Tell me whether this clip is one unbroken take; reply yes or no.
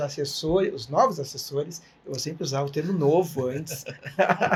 yes